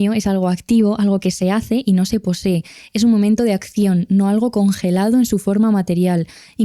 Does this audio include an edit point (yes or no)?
no